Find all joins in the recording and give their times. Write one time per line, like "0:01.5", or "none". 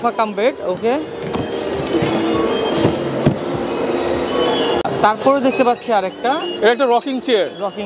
0:04.8